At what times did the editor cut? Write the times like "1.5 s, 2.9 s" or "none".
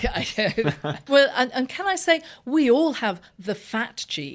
1.0 s